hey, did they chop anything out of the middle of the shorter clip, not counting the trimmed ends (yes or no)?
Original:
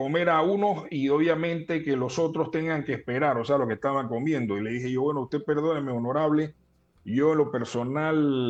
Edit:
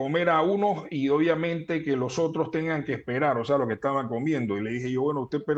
no